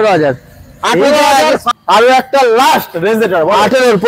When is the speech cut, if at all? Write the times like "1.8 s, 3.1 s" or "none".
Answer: 1.6 s